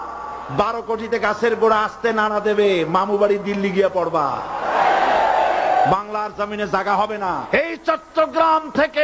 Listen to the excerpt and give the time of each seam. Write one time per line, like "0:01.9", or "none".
0:07.5